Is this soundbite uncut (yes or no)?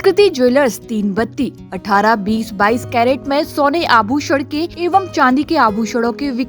no